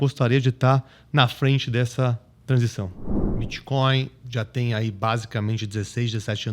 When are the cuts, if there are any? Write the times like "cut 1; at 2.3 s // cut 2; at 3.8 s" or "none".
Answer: cut 1; at 3.0 s